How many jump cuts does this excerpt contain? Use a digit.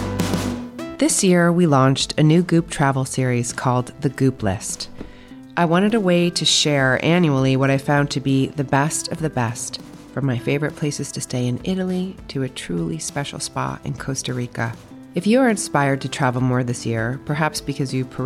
1